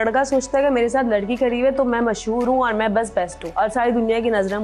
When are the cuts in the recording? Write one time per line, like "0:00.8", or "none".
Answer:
0:03.4